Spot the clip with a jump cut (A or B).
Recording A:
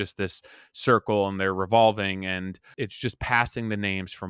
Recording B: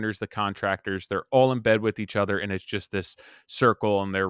A